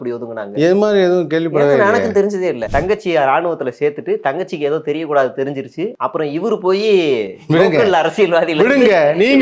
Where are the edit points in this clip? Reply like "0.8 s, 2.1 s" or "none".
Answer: 2.6 s, 6.0 s